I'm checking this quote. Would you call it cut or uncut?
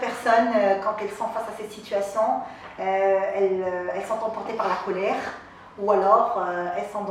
uncut